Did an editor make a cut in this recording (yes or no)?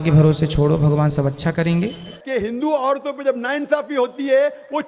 yes